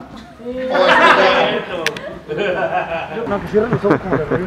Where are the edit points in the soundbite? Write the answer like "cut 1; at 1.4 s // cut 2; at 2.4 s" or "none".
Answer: cut 1; at 3.2 s